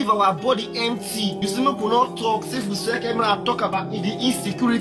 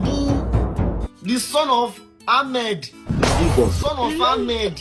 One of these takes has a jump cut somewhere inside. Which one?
second; 1 cut; at 1.1 s

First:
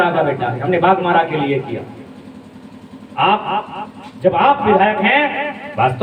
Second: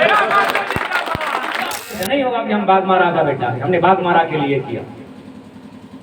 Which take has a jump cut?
second; 1 cut; at 1.9 s

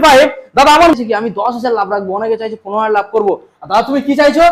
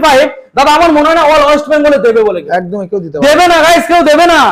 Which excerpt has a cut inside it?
first; 1 cut; at 0.9 s

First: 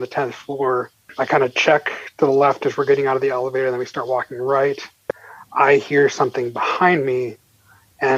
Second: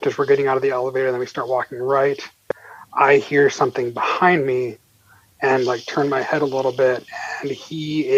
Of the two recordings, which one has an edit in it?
first; 1 cut; at 1.0 s

